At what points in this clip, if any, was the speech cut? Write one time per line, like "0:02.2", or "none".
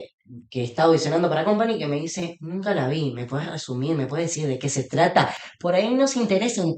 0:05.4